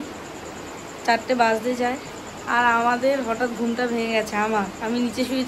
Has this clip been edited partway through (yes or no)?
no